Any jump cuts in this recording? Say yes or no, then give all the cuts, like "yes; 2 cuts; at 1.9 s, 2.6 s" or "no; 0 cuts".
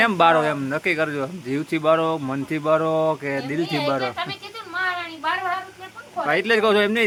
no; 0 cuts